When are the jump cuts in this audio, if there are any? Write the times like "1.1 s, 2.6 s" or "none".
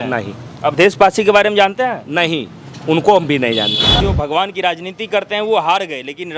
4.0 s